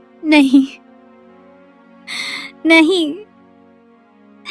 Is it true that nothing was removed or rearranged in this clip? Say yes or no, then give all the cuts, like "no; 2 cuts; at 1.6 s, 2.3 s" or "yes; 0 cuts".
yes; 0 cuts